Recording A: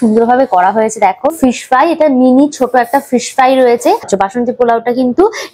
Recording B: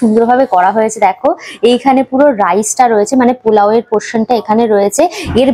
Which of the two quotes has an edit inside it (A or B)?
A